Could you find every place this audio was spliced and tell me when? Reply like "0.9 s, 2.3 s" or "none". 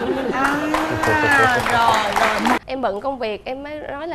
2.6 s